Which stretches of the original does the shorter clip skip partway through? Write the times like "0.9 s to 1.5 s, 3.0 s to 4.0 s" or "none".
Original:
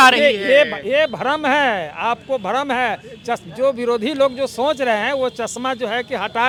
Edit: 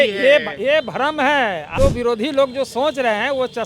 1.9 s to 3.5 s